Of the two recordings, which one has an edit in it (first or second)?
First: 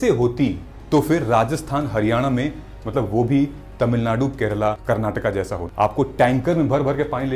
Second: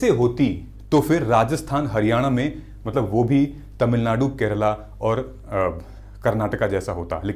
first